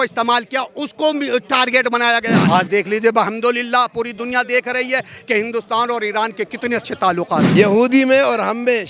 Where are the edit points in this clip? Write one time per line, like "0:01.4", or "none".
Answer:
0:02.4
0:07.5